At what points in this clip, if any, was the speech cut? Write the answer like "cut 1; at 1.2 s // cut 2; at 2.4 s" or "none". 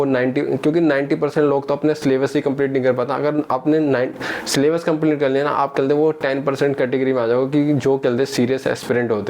none